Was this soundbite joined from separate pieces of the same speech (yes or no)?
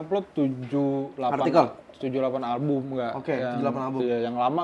no